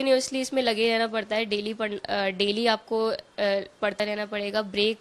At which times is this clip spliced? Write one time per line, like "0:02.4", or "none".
none